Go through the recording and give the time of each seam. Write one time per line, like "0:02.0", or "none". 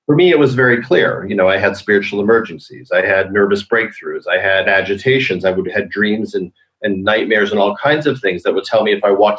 0:04.6